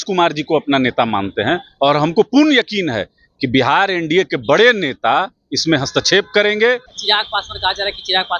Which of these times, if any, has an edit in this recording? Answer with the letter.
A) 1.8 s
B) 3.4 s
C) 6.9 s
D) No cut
C